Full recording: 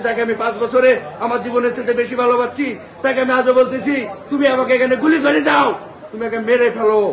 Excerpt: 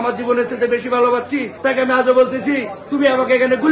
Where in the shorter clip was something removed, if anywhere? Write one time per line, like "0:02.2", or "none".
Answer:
0:01.5